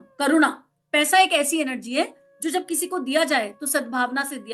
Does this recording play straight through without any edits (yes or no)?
yes